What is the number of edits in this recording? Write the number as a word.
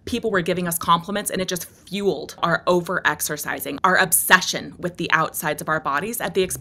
two